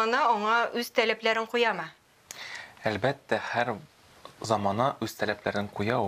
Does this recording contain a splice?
no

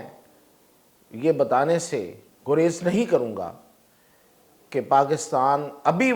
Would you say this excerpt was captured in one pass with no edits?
yes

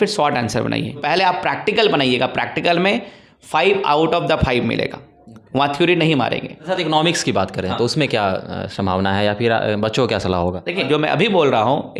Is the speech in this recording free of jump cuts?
no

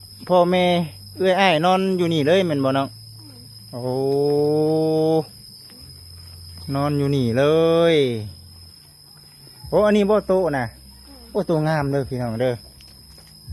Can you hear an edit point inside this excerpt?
no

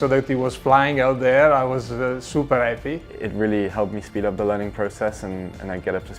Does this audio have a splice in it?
yes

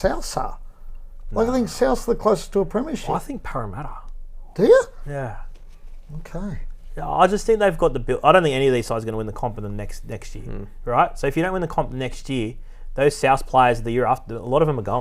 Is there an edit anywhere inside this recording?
no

